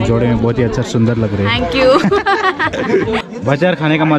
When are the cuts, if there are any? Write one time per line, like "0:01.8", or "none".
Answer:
0:03.2